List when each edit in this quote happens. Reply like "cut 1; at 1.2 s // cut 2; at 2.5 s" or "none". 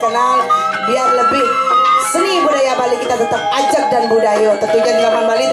none